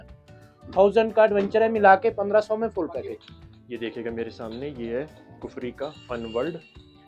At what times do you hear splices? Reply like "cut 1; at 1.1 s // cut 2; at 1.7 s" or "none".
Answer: cut 1; at 3.1 s